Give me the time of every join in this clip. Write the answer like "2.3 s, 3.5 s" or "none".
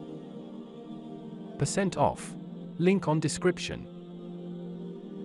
none

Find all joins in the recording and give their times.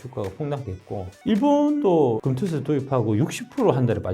1.9 s

